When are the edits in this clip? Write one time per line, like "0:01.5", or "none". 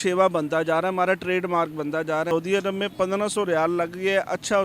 0:02.3